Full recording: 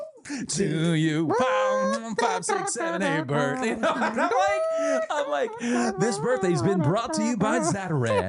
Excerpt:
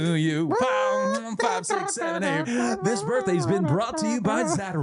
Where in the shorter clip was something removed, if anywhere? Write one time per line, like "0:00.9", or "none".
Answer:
0:02.5